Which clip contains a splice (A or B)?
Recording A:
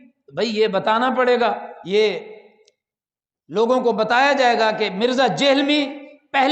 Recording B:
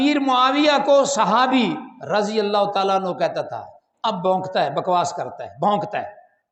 A